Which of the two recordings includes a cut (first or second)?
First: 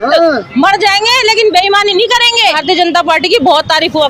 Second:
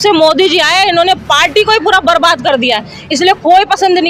first